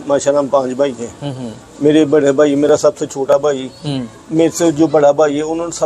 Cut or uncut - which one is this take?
uncut